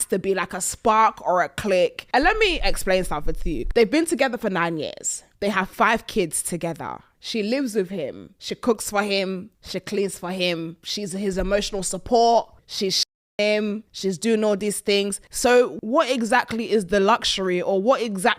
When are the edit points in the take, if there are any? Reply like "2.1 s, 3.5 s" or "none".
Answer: none